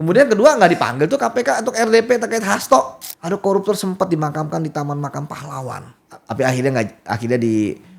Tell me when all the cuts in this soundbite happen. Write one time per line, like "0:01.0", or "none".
0:03.0